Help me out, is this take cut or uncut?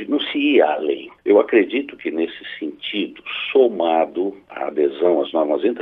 cut